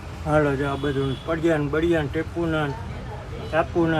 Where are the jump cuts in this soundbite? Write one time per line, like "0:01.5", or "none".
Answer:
none